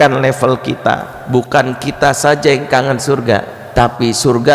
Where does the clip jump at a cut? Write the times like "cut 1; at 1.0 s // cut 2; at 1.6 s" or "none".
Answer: cut 1; at 1.1 s // cut 2; at 3.6 s